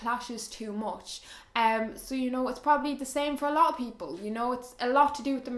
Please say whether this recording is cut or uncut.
uncut